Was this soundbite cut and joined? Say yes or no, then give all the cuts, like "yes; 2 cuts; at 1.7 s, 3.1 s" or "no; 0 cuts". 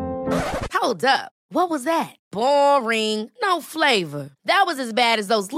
no; 0 cuts